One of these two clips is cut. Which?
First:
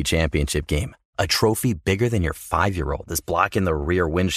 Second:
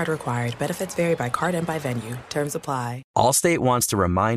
second; 1 cut; at 3.0 s

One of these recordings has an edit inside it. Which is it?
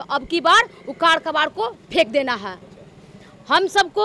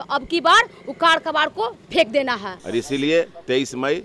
second; 1 cut; at 2.5 s

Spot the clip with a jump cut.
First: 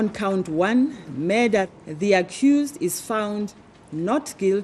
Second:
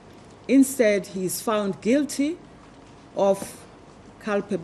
first; 1 cut; at 1.8 s

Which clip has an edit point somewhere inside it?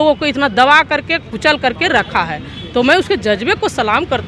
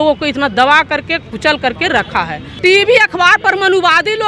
second; 1 cut; at 2.5 s

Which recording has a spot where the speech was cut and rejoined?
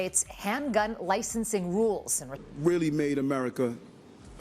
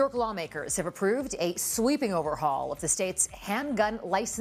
first; 1 cut; at 2.4 s

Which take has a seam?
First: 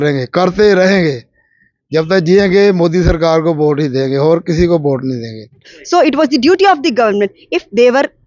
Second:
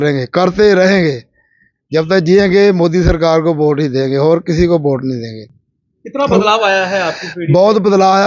first; 1 cut; at 5.7 s

